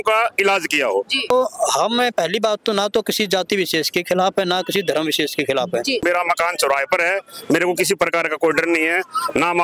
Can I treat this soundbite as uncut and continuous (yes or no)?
no